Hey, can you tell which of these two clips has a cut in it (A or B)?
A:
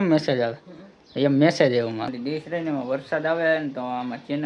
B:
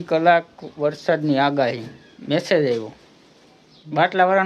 A